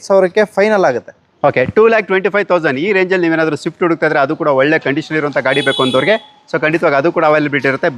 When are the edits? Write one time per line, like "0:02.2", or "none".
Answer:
none